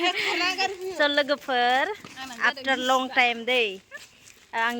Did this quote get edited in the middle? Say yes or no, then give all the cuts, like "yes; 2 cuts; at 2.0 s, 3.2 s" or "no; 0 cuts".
no; 0 cuts